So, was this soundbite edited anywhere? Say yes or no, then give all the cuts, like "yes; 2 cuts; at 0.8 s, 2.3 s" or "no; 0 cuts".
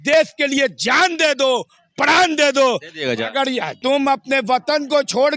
yes; 1 cut; at 3.8 s